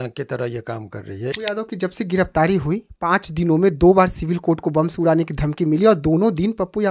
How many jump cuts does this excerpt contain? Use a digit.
1